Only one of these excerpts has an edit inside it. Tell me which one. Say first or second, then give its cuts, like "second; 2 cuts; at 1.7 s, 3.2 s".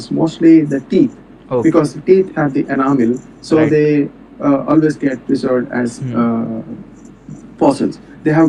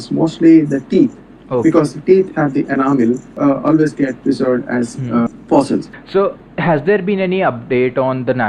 second; 3 cuts; at 3.3 s, 5.3 s, 6.0 s